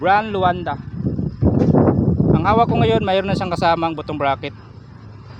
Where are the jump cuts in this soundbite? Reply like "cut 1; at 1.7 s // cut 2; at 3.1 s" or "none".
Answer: none